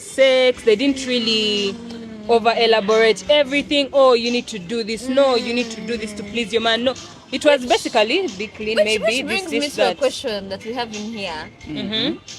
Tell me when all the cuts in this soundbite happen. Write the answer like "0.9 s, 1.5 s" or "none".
none